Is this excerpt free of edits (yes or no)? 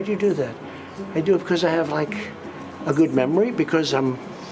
yes